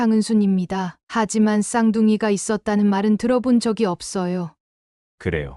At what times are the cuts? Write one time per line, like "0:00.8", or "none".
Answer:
0:04.6

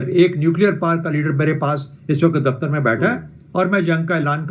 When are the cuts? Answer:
none

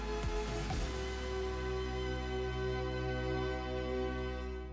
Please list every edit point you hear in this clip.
0:02.9

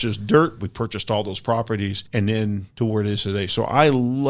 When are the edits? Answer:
0:02.0
0:02.7

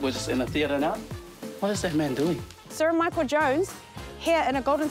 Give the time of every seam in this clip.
0:02.7

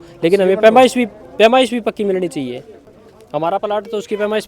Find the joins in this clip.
none

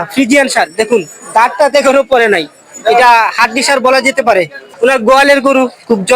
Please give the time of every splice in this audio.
0:04.6

